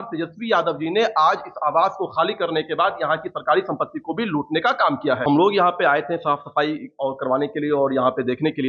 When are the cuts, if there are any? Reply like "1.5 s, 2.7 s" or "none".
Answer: 5.2 s